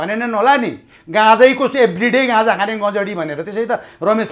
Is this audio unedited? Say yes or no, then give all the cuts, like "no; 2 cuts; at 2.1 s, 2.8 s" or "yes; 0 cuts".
yes; 0 cuts